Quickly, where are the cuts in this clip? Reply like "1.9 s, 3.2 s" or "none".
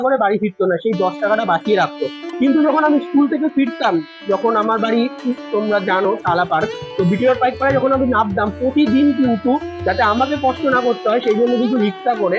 none